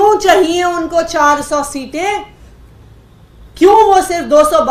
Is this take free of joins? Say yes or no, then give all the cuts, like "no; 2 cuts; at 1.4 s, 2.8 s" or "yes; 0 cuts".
yes; 0 cuts